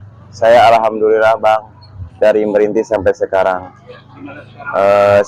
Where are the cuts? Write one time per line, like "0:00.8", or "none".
none